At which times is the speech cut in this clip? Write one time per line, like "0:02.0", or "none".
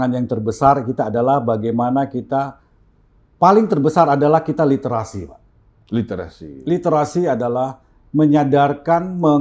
none